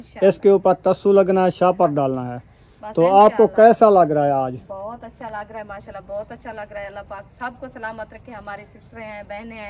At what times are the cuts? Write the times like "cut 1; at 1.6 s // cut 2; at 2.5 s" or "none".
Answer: none